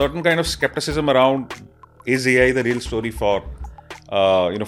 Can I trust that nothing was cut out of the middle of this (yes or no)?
yes